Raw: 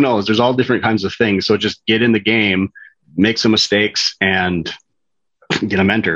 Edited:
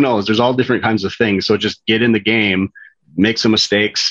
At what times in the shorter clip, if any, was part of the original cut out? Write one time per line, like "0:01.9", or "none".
none